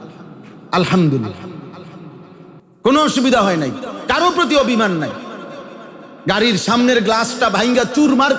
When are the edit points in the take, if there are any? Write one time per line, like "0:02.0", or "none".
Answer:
0:02.6